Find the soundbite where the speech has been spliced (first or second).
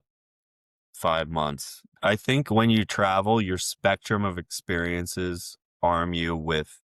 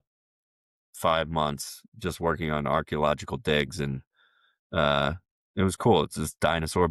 first